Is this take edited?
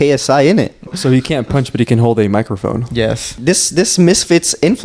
yes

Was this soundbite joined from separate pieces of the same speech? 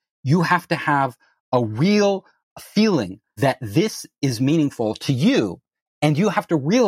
yes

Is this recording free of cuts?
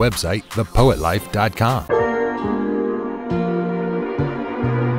no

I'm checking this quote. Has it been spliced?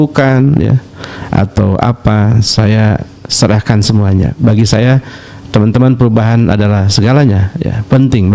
no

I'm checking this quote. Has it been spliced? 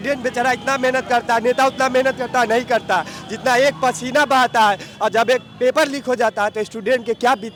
no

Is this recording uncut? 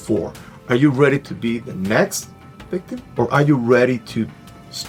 yes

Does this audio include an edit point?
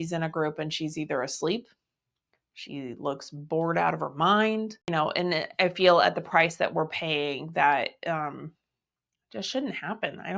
yes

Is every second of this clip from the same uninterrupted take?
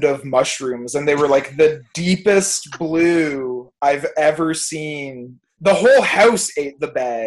no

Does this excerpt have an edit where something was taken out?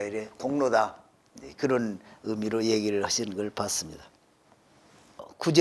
no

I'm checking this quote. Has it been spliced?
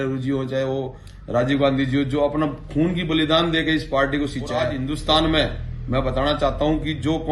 yes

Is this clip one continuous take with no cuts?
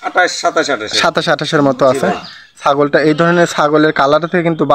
yes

